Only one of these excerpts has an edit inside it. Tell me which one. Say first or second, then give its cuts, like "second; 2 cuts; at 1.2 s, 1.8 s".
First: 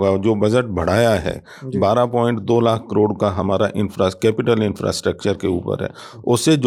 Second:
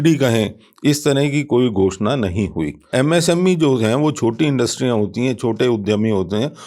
second; 1 cut; at 2.8 s